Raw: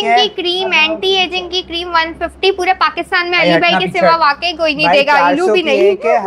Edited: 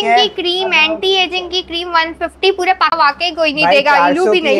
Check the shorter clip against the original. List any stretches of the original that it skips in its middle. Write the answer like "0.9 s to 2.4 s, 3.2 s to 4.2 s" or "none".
3.0 s to 4.2 s